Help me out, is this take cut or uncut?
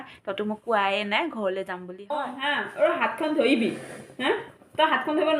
cut